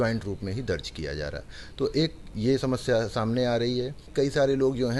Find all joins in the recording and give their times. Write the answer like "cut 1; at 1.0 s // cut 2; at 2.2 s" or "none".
cut 1; at 4.0 s